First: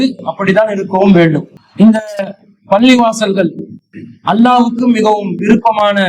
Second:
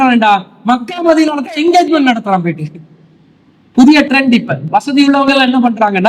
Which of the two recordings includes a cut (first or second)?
first